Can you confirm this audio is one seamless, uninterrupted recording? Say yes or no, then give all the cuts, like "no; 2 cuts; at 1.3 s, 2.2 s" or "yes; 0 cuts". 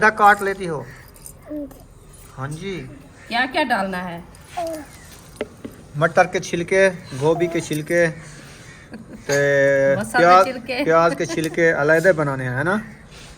yes; 0 cuts